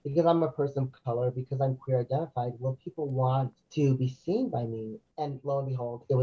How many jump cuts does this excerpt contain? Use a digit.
2